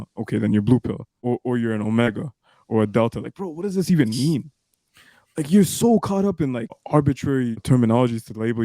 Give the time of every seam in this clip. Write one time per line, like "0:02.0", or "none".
0:01.2
0:06.8
0:07.6